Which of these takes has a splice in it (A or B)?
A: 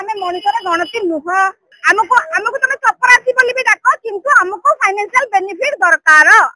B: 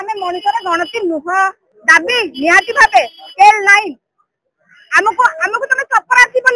A